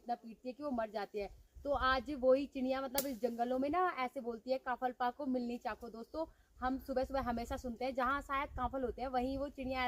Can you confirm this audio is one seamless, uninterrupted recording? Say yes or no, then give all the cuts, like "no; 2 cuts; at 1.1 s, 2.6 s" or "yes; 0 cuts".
yes; 0 cuts